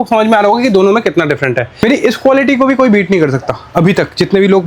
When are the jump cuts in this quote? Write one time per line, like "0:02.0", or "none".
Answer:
0:01.8